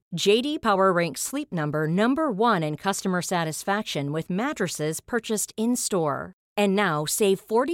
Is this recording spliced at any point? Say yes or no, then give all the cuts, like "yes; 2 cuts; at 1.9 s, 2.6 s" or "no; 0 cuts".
no; 0 cuts